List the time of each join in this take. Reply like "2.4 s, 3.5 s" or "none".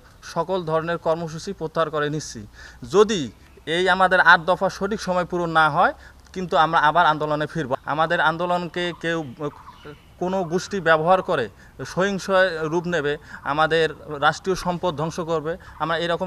7.7 s

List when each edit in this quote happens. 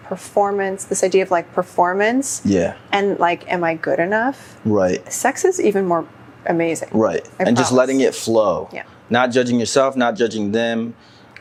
none

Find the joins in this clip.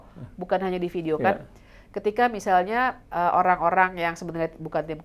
none

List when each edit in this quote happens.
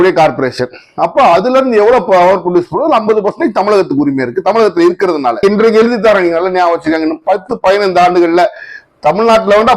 5.4 s

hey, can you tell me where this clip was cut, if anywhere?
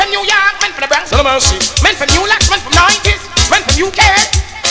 1.0 s

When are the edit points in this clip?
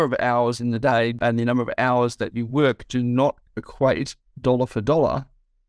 1.2 s

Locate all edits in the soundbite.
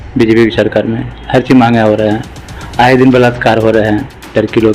none

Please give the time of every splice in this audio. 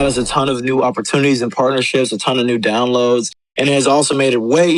none

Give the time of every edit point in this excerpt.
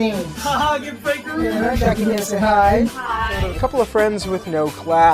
3.5 s

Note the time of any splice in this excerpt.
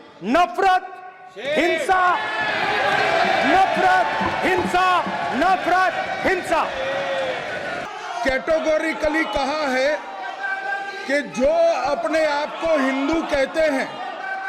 7.9 s

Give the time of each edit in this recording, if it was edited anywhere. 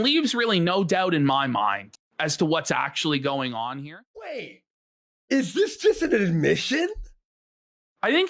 4.2 s

